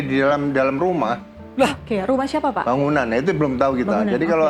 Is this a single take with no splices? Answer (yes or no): yes